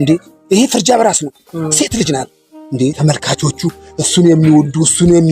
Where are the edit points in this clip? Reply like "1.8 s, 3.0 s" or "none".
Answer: 2.9 s